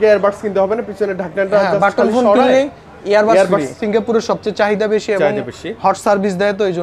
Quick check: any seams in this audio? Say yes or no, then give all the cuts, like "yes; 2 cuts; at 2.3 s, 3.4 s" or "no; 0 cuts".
yes; 1 cut; at 3.8 s